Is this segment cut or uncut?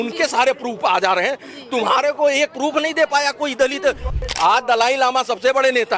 cut